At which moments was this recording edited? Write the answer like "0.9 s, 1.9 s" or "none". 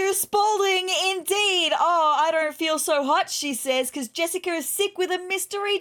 none